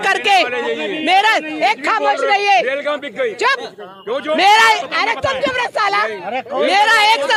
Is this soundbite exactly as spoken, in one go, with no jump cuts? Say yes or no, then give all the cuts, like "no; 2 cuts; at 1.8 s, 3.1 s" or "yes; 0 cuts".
yes; 0 cuts